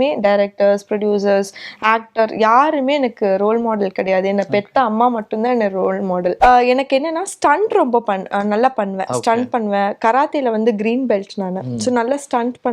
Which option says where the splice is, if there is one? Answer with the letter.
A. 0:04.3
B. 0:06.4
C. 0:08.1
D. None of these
B